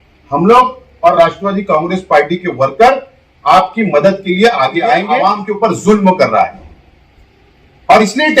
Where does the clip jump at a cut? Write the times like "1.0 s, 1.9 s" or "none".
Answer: 5.3 s

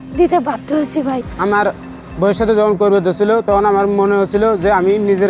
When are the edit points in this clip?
1.3 s

